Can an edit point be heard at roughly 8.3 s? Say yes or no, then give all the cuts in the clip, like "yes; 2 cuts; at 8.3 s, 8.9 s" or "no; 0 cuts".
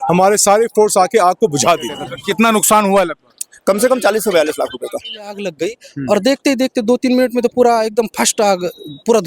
no; 2 cuts; at 2.1 s, 5.5 s